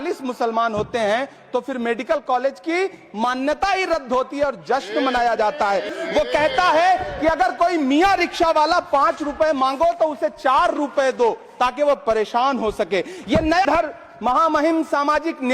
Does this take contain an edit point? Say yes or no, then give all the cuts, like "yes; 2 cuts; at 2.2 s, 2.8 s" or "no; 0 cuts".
yes; 2 cuts; at 5.9 s, 13.6 s